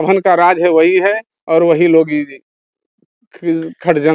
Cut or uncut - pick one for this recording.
uncut